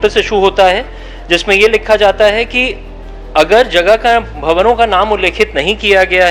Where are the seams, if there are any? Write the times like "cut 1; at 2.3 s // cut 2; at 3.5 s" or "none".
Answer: none